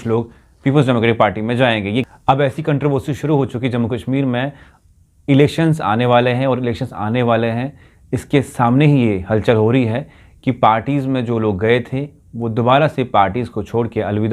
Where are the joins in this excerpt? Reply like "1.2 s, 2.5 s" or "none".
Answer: 2.1 s